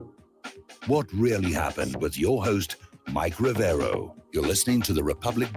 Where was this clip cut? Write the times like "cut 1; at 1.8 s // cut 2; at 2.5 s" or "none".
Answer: cut 1; at 4.2 s